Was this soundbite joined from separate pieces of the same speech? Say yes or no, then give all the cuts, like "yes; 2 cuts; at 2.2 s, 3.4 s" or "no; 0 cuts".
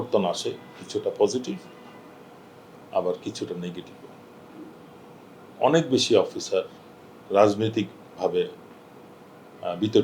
no; 0 cuts